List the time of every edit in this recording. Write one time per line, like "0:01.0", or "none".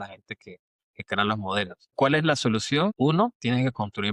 0:02.9